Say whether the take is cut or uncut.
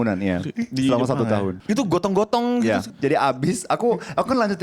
cut